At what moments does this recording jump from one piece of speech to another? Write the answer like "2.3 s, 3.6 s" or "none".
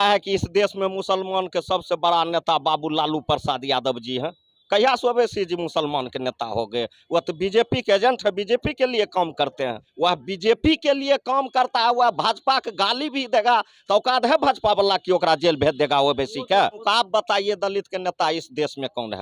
9.8 s, 16.8 s